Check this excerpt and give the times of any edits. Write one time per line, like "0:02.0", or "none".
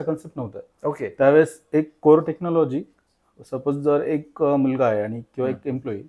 none